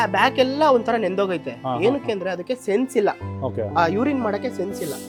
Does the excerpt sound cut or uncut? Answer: uncut